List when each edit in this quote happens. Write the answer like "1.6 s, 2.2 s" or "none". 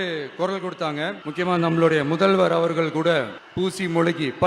1.2 s, 3.4 s